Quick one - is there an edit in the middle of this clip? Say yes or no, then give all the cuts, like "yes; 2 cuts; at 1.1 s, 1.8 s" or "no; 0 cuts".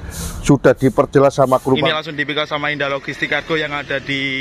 yes; 1 cut; at 1.9 s